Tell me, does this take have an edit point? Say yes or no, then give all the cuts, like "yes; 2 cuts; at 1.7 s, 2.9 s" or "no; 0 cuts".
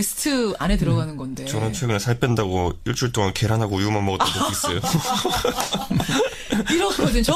no; 0 cuts